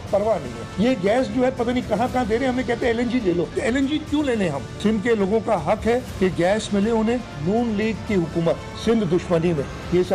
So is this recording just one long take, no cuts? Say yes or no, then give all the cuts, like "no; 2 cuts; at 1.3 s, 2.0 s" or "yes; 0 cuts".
yes; 0 cuts